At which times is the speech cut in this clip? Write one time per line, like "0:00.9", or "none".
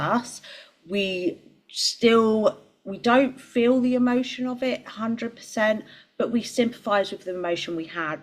none